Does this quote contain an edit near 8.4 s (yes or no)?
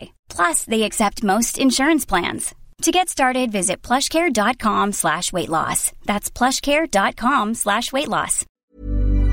yes